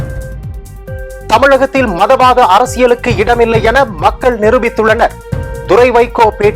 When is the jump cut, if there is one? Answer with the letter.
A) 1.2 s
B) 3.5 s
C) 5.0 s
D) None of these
A